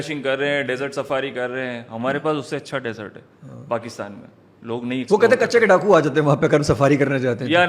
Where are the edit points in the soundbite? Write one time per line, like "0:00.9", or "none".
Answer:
none